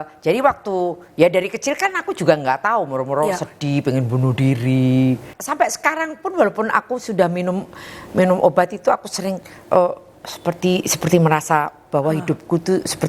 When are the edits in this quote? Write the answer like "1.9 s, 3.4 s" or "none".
5.3 s